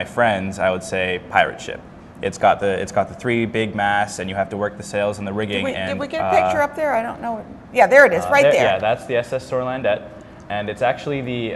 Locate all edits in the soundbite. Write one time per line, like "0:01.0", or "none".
0:05.4